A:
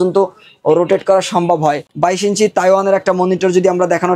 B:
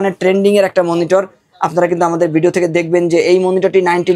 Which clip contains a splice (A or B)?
A